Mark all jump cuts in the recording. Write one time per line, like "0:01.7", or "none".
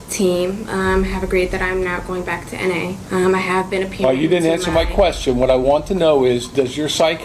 0:03.0